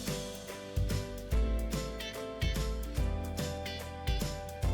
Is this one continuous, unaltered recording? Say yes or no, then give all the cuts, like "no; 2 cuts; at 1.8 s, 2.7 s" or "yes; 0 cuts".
yes; 0 cuts